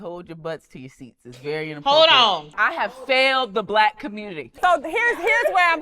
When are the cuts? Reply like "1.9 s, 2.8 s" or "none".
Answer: 2.5 s, 4.4 s